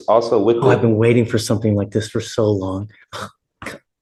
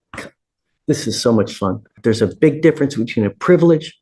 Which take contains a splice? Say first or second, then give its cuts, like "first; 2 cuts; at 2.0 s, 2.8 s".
second; 1 cut; at 2.0 s